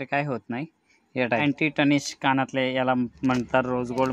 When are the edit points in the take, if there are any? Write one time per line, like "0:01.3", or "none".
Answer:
0:01.4